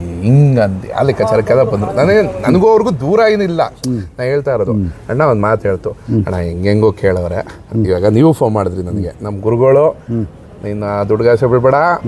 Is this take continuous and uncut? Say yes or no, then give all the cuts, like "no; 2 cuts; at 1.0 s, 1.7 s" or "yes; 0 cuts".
yes; 0 cuts